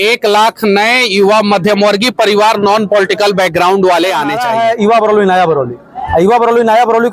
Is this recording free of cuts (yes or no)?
no